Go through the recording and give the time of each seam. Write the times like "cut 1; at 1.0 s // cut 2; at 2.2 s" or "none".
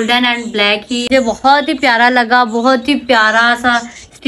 cut 1; at 1.1 s